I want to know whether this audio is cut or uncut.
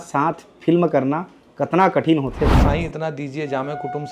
cut